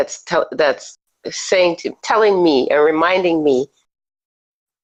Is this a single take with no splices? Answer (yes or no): yes